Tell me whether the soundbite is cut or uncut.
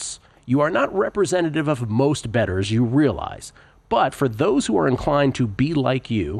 uncut